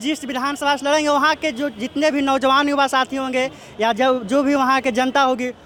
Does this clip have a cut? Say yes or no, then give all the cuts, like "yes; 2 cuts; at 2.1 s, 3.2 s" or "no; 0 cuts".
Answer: no; 0 cuts